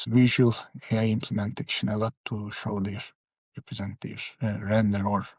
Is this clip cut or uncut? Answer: uncut